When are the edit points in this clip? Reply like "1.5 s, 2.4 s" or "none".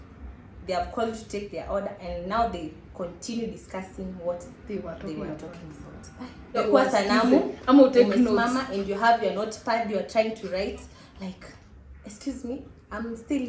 6.6 s

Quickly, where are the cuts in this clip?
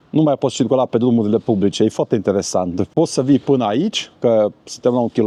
none

